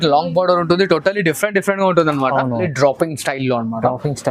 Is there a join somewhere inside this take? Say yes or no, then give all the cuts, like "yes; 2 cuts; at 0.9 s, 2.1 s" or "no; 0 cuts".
yes; 1 cut; at 2.7 s